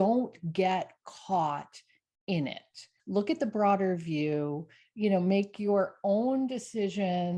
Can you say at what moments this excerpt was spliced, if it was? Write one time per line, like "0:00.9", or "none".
0:03.0

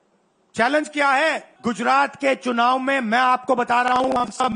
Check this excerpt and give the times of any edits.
0:01.5

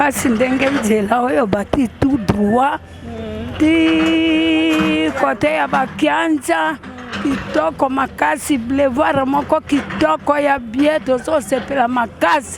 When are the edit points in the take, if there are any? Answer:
none

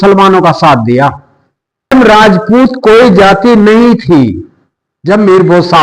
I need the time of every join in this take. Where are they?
0:01.9

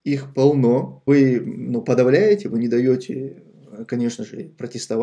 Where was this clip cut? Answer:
0:01.0

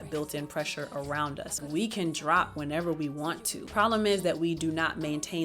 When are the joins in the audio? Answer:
0:01.6
0:03.6

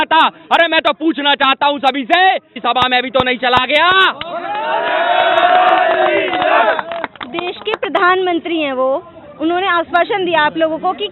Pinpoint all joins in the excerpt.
none

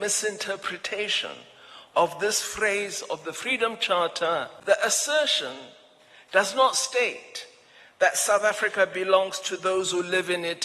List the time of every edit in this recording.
0:04.5

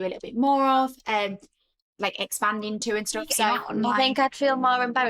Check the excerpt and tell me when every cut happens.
0:03.7

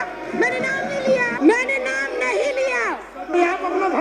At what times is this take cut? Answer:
0:01.3

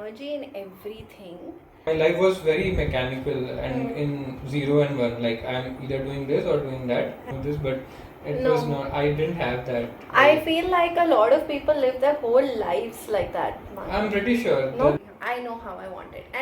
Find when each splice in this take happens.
0:01.9
0:07.2
0:15.0

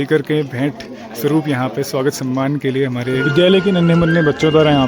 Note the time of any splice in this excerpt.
0:03.2

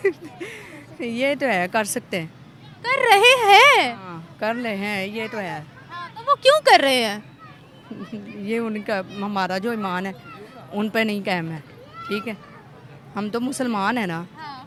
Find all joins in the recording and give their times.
none

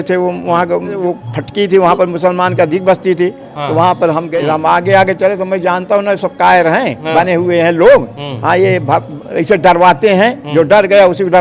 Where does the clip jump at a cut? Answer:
0:01.0
0:04.4

